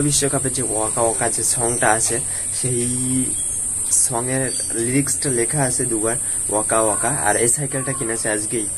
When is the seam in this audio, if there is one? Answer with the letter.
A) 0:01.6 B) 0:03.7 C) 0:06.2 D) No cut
D